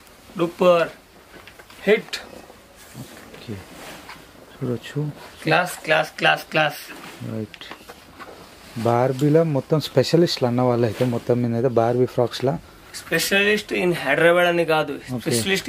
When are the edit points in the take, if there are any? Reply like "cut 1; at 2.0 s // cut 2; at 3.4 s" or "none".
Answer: none